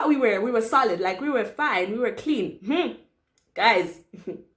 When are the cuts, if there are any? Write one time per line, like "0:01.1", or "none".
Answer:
none